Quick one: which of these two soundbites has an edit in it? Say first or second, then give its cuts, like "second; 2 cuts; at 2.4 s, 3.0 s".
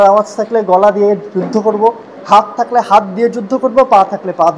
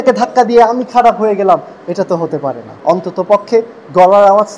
second; 1 cut; at 2.7 s